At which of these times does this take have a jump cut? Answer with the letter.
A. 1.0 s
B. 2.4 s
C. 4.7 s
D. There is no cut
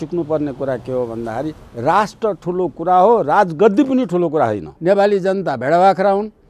C